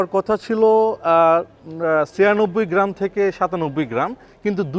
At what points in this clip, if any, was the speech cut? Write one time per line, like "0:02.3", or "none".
none